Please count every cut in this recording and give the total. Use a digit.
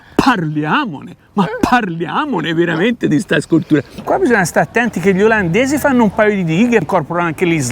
1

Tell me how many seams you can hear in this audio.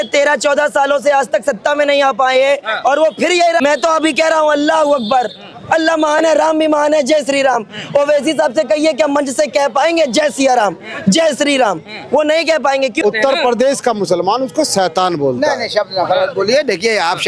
2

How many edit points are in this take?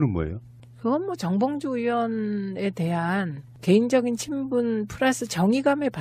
0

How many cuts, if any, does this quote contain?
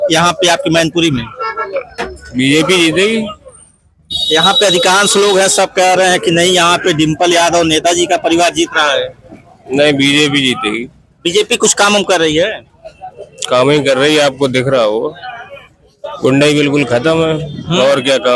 0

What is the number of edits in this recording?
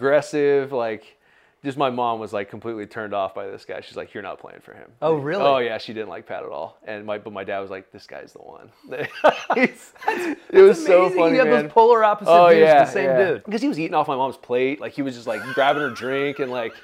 1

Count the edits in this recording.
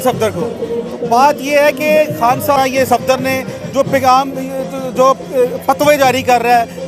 1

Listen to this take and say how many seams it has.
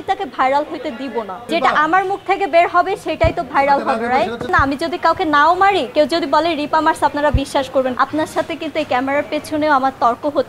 3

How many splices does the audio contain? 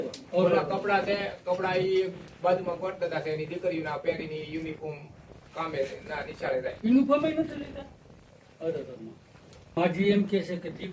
1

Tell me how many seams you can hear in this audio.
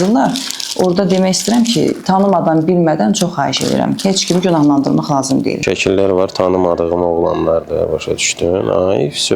1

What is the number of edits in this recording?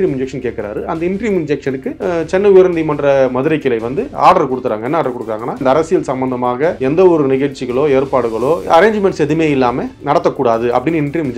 5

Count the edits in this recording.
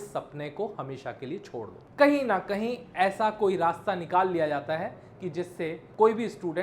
1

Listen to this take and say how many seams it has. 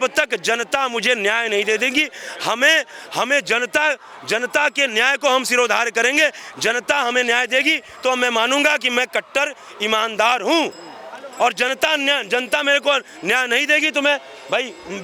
0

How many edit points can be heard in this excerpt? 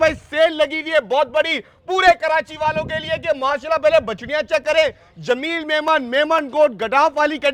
0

